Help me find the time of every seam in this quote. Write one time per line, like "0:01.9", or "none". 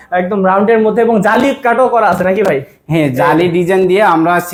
none